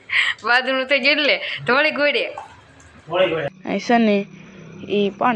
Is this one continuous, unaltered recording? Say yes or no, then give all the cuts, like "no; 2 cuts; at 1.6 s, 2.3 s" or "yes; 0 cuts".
no; 1 cut; at 3.6 s